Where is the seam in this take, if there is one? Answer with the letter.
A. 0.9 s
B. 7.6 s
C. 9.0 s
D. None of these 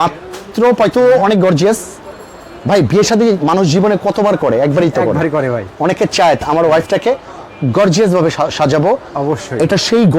A